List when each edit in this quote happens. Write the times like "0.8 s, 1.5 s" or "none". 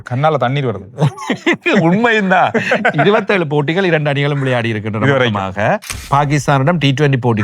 6.0 s